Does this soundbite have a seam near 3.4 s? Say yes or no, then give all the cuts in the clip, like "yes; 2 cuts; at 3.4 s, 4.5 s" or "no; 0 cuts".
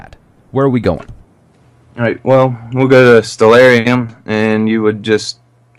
yes; 1 cut; at 3.4 s